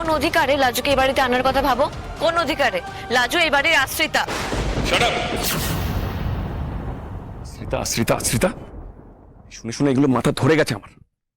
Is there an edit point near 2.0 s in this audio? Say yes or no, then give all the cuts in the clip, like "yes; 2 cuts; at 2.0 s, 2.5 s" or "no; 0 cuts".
no; 0 cuts